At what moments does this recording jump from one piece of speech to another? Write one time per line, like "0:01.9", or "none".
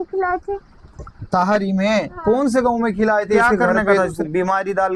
0:04.0